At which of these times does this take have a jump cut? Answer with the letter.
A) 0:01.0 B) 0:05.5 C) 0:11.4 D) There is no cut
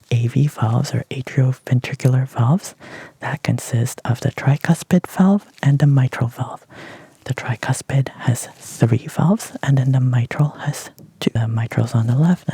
C